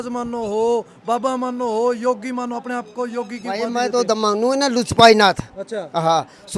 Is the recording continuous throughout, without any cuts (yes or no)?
yes